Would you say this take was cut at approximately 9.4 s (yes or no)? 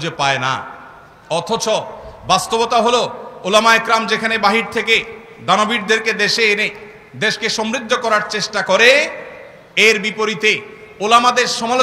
no